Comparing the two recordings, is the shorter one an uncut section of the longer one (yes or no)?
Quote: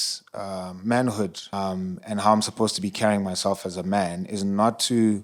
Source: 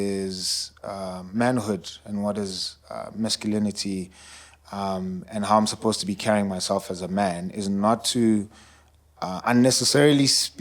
no